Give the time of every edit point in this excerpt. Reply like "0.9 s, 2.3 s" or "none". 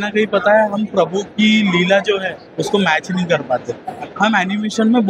none

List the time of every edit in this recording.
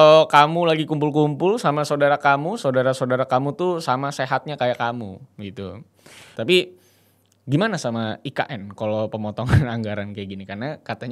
6.3 s

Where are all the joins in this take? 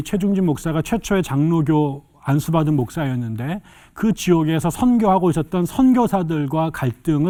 none

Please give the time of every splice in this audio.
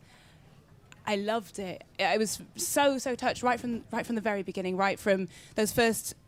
none

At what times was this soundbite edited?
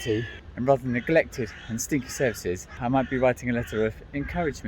2.7 s

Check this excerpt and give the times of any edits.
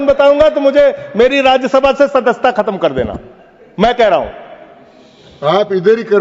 none

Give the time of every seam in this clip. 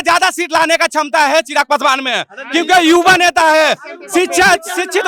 none

